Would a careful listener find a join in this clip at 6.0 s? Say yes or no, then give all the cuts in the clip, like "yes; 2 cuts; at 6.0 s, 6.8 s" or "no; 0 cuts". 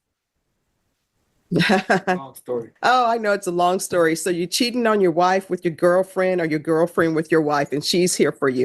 no; 1 cut; at 2.7 s